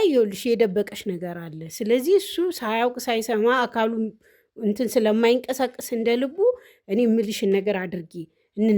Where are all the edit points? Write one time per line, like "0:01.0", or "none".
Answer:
none

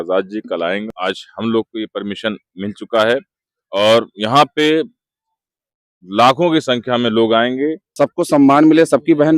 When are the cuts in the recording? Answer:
0:00.9
0:07.8

